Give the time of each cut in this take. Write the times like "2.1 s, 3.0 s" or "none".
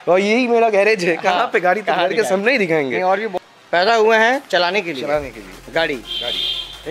3.3 s